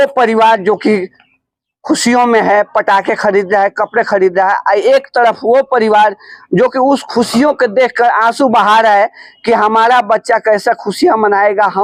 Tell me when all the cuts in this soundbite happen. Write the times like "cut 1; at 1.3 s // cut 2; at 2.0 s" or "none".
none

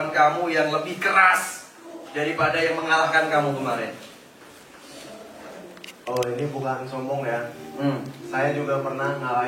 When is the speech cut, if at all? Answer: none

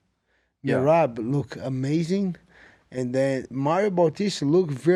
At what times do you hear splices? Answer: none

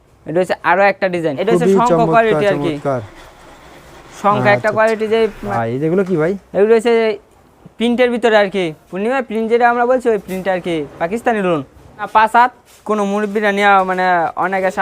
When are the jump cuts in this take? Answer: cut 1; at 1.4 s // cut 2; at 5.4 s // cut 3; at 12.1 s

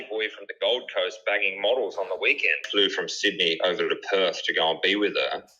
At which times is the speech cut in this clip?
cut 1; at 2.6 s

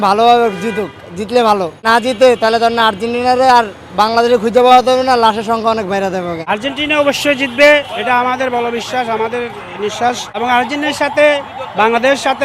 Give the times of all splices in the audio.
cut 1; at 1.8 s // cut 2; at 6.4 s // cut 3; at 10.4 s

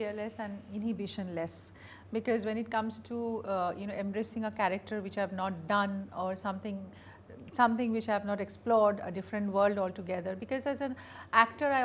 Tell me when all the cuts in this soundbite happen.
none

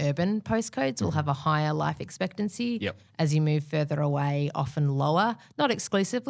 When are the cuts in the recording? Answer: none

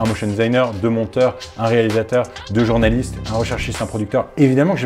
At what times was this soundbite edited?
none

